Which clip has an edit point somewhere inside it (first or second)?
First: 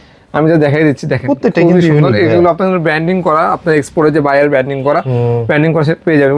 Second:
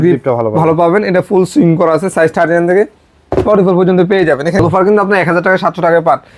second